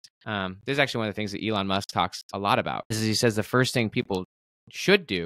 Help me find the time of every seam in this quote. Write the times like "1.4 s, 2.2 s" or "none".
3.0 s